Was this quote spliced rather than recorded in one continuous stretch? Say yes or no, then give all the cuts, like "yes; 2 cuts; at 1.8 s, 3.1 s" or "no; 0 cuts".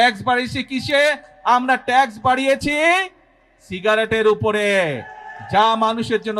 no; 0 cuts